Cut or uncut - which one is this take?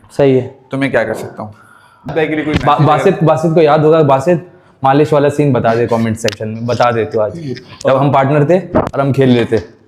cut